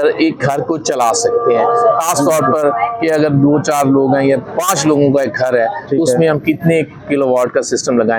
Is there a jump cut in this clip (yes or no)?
no